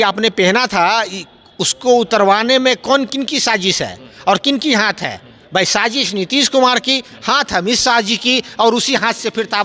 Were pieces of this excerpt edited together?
no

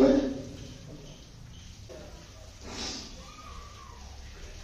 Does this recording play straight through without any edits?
no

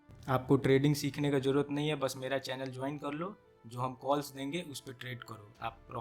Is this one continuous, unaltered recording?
yes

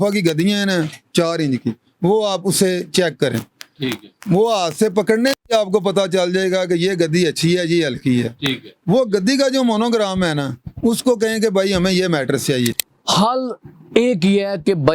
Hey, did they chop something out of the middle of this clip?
yes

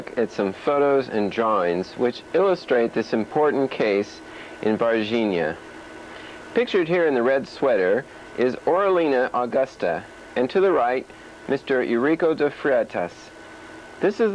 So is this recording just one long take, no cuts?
no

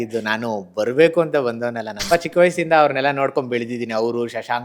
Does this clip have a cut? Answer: yes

